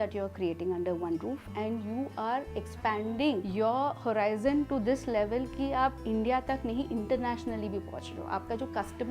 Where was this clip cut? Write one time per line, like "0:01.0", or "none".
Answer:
0:03.5